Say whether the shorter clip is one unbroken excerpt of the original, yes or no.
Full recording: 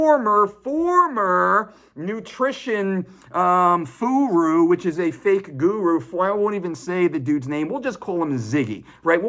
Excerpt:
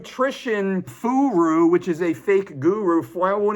no